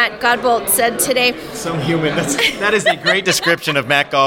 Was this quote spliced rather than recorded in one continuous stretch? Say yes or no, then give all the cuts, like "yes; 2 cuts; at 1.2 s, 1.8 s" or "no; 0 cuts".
no; 0 cuts